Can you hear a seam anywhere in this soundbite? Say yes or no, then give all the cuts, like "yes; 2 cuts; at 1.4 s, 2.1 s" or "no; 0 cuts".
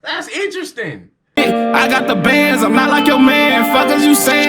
yes; 1 cut; at 1.1 s